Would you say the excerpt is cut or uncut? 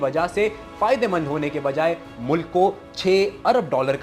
uncut